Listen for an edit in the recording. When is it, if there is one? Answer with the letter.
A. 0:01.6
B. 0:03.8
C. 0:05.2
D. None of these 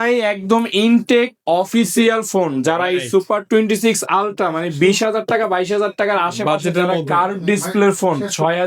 D